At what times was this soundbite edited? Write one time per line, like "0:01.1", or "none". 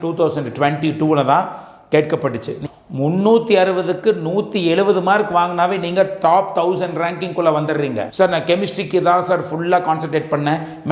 0:02.6
0:08.0